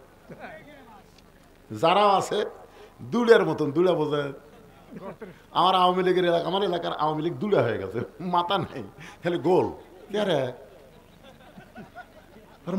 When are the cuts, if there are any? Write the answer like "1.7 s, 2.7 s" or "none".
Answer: none